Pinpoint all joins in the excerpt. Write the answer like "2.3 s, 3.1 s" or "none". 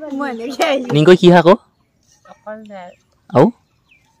0.9 s